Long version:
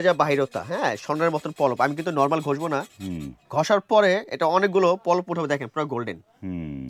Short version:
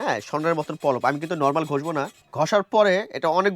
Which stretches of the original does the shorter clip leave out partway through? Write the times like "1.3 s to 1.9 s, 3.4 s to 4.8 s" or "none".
3.0 s to 3.4 s

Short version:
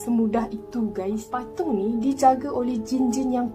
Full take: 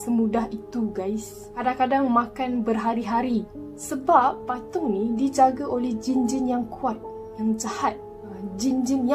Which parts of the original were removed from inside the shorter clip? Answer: 1.4 s to 4.5 s

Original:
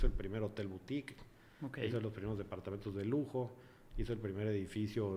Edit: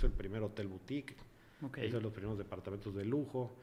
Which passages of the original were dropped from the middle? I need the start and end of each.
none

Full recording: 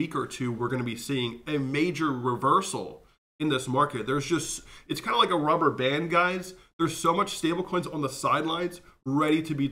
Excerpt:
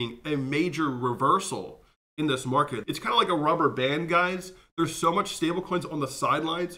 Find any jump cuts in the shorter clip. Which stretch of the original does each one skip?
4.0 s to 4.8 s

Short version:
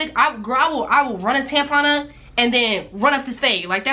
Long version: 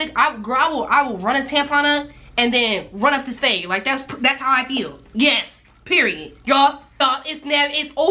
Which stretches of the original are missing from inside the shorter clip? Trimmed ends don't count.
none

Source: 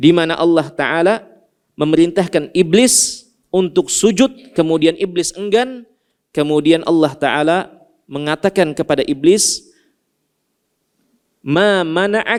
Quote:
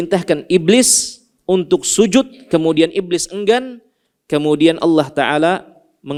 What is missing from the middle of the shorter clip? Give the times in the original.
none

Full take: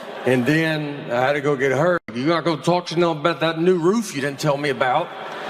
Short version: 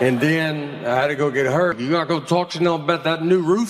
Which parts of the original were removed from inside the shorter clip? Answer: 2.0 s to 2.1 s

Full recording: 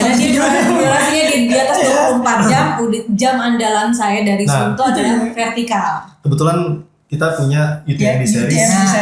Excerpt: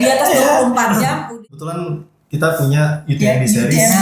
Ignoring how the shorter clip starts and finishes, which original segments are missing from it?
2.7 s to 6.0 s

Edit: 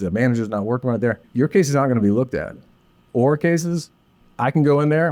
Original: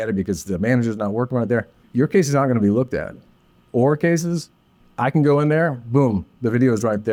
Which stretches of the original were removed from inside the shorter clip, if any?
1.7 s to 1.8 s

